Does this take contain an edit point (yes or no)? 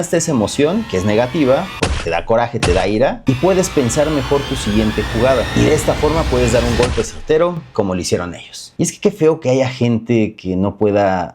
yes